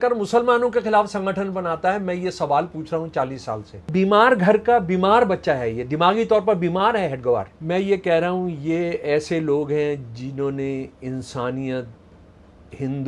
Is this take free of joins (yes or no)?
no